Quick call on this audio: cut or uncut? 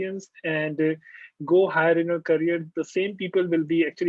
uncut